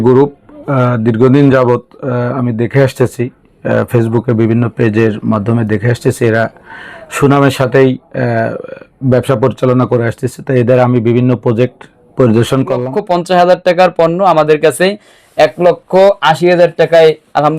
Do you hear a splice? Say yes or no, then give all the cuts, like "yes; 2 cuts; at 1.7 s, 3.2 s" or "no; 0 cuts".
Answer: yes; 1 cut; at 12.9 s